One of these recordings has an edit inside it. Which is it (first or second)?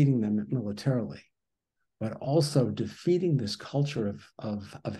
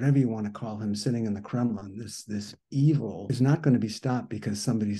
second